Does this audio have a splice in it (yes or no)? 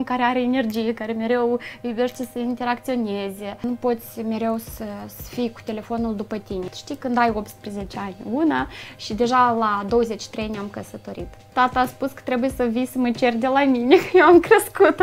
yes